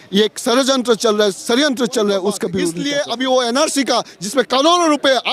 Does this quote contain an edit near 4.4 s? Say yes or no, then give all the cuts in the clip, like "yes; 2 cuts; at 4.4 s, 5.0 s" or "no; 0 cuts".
no; 1 cut; at 2.8 s